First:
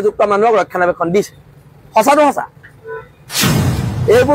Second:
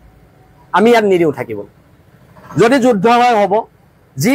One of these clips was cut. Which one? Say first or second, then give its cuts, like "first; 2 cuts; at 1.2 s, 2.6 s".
first; 1 cut; at 3.4 s